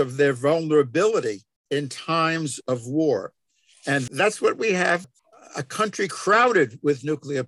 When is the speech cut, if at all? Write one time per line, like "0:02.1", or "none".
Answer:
0:01.5
0:05.0